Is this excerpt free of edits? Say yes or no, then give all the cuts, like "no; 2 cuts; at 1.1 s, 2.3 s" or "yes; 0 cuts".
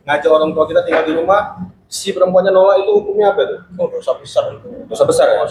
yes; 0 cuts